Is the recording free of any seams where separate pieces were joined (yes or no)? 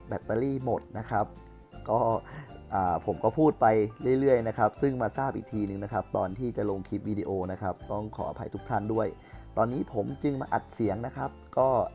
yes